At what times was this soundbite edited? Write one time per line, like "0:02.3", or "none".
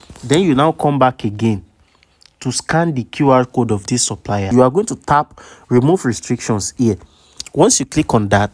0:04.5